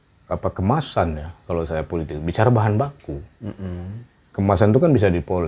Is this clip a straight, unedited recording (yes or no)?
yes